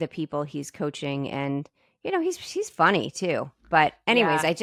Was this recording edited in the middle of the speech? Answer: no; 0 cuts

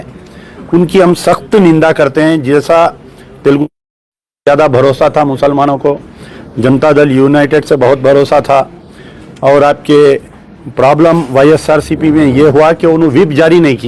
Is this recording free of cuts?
yes; 0 cuts

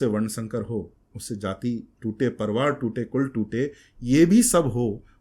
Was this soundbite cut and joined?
no; 0 cuts

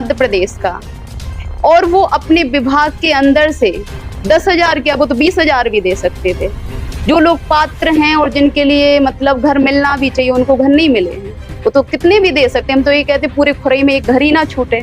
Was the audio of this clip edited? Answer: no; 0 cuts

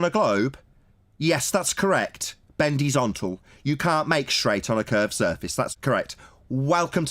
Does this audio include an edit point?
yes; 1 cut; at 5.7 s

